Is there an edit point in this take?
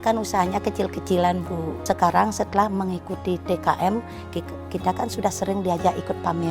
yes; 1 cut; at 1.8 s

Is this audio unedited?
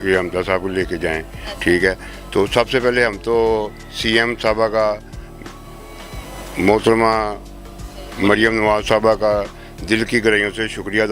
yes; 0 cuts

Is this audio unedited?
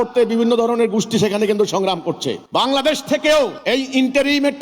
no; 2 cuts; at 2.4 s, 3.6 s

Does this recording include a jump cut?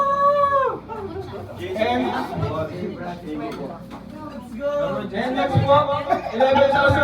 no; 0 cuts

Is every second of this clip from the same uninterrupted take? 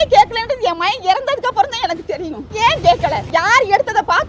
no; 2 cuts; at 2.4 s, 3.2 s

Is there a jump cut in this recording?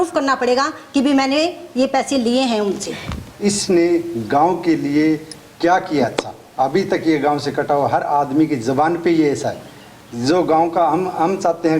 yes; 1 cut; at 3.2 s

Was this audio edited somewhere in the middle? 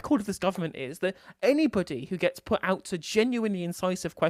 no; 0 cuts

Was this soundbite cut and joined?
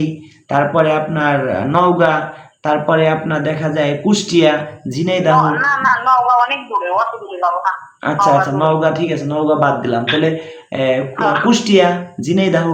no; 0 cuts

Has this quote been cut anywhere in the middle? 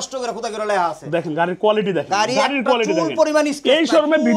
no; 0 cuts

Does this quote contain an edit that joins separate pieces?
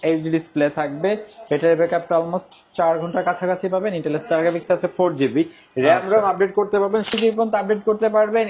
yes; 1 cut; at 7.1 s

